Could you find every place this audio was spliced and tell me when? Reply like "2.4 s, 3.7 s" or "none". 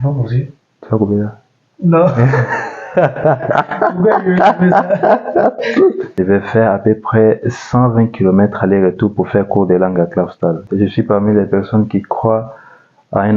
6.2 s, 10.7 s